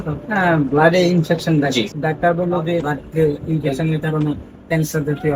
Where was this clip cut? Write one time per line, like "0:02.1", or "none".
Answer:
0:01.9
0:02.9